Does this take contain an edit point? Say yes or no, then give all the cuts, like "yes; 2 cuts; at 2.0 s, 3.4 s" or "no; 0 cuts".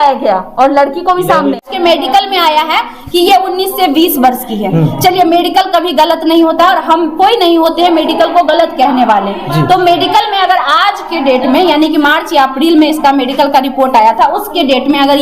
yes; 1 cut; at 1.7 s